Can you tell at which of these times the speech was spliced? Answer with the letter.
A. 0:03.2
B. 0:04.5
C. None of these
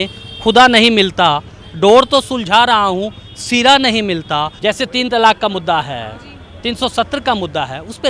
B